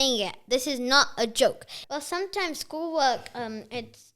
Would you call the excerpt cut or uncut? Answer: cut